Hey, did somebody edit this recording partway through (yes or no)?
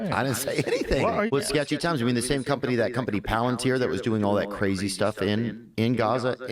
yes